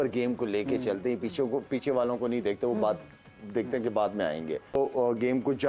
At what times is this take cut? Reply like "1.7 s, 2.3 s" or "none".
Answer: 4.8 s